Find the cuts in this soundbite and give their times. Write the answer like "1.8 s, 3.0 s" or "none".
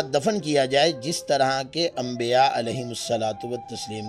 none